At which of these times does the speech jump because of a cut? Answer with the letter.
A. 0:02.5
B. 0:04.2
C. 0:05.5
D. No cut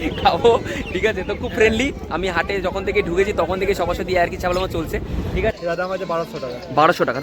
C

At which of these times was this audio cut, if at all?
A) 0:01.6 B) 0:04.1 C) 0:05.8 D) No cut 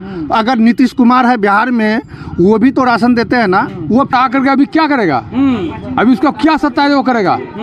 B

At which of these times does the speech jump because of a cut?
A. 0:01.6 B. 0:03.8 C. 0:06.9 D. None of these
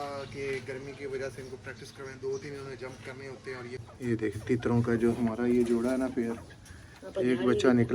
B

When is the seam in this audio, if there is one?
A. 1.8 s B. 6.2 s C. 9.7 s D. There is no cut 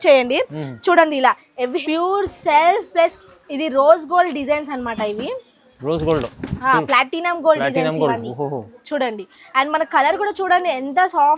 A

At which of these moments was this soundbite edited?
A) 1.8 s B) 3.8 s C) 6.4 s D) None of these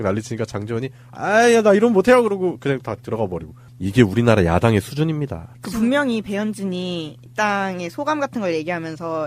C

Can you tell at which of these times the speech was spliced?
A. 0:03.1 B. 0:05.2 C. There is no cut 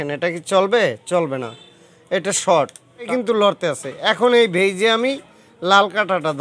A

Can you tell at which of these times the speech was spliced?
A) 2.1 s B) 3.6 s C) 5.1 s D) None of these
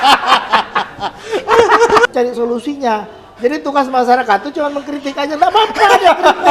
A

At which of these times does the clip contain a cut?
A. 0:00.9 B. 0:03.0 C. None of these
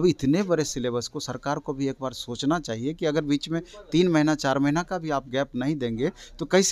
C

